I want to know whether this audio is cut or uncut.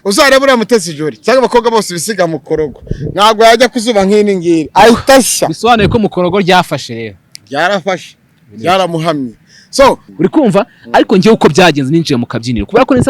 cut